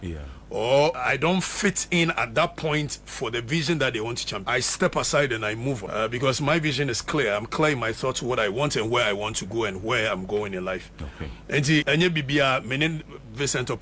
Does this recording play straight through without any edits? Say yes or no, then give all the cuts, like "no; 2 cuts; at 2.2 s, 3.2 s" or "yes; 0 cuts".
no; 4 cuts; at 1.0 s, 4.3 s, 5.8 s, 11.8 s